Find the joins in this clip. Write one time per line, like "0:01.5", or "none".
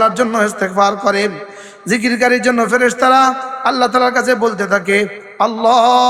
none